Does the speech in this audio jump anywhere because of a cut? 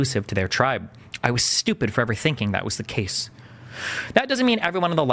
no; 0 cuts

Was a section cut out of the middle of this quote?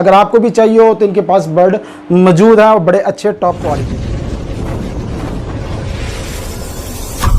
yes; 1 cut; at 3.8 s

